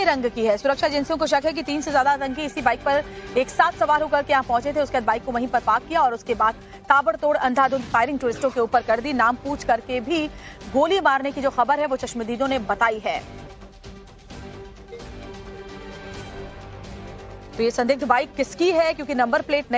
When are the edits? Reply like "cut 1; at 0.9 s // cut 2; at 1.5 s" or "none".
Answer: none